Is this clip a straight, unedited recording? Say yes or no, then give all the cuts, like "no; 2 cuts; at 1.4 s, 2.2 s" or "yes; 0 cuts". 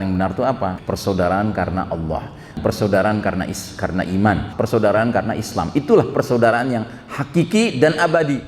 no; 3 cuts; at 0.8 s, 2.6 s, 4.5 s